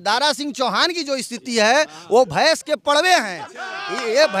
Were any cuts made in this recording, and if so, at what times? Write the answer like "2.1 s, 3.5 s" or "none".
none